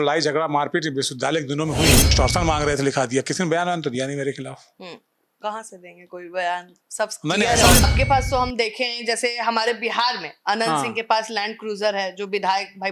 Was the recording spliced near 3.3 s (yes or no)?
no